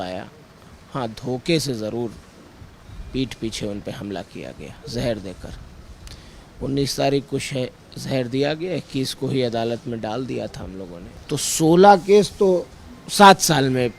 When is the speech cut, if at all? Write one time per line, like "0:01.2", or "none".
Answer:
0:11.1